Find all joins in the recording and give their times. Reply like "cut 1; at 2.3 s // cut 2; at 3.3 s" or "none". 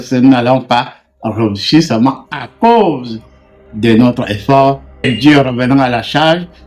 cut 1; at 5.0 s